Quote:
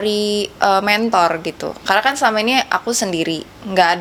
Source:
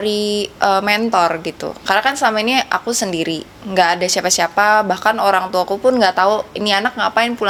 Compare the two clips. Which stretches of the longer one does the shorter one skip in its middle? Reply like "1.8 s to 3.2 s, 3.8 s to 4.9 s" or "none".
none